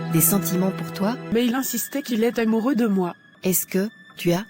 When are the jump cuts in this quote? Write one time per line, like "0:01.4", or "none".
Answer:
0:01.2
0:03.2